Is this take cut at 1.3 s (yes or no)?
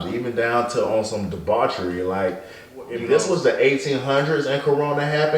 no